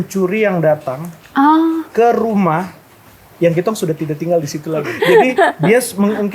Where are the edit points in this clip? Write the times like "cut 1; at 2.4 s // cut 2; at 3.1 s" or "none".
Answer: cut 1; at 4.9 s

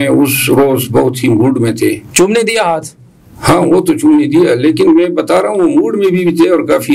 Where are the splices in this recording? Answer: none

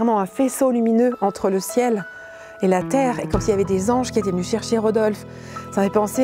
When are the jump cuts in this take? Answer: none

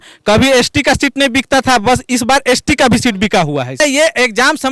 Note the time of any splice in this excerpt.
cut 1; at 3.8 s

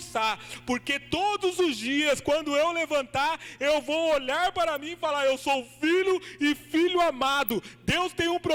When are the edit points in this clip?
none

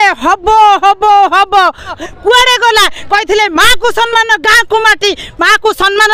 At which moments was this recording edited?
cut 1; at 2.0 s

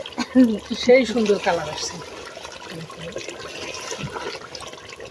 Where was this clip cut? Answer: none

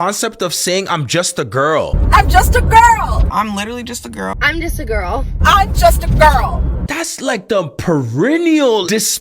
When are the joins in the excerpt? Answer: cut 1; at 1.9 s // cut 2; at 3.3 s // cut 3; at 5.3 s // cut 4; at 6.8 s

